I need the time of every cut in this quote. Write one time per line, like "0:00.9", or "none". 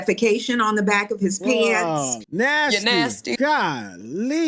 0:02.2